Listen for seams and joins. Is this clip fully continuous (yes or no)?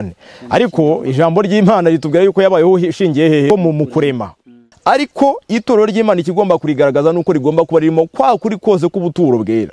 no